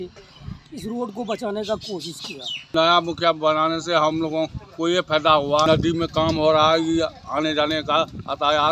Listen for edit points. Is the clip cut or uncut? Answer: cut